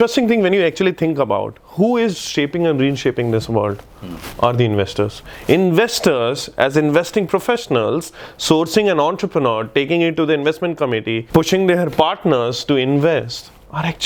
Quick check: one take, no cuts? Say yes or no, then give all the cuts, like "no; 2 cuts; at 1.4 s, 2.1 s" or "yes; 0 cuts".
yes; 0 cuts